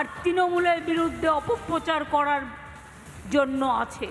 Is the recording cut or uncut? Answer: uncut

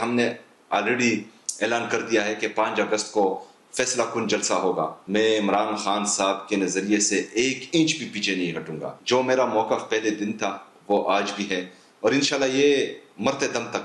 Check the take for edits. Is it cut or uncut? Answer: cut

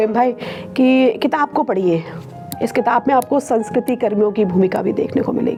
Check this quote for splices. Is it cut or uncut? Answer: uncut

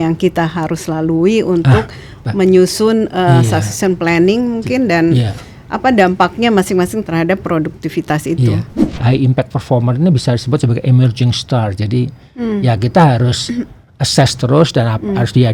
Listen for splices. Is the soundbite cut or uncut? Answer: cut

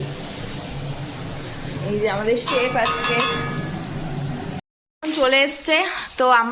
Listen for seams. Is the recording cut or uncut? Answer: cut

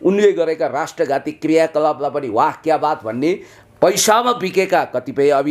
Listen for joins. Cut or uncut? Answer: cut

